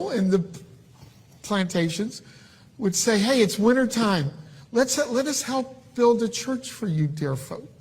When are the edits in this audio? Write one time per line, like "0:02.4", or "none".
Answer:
0:03.0